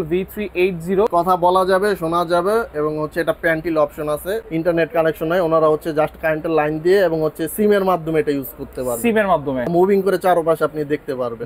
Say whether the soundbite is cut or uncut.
cut